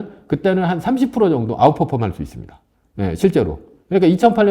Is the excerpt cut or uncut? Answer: uncut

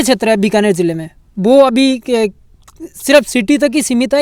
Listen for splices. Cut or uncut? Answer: uncut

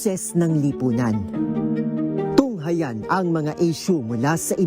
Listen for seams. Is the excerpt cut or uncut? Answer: uncut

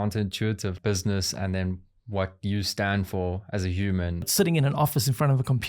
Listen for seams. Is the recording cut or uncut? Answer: cut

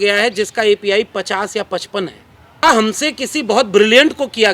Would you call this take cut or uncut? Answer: cut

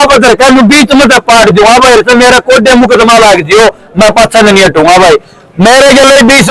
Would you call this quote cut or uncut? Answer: uncut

